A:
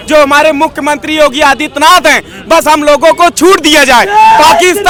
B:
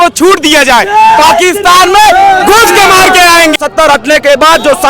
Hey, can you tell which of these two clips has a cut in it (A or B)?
B